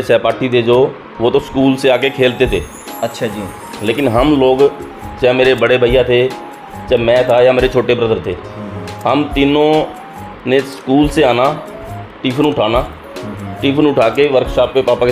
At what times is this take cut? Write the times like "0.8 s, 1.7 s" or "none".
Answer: none